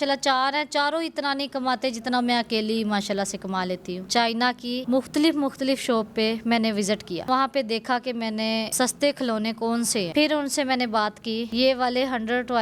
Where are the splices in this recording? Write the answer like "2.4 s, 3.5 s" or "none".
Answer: 4.0 s, 4.8 s, 7.2 s, 8.7 s, 10.1 s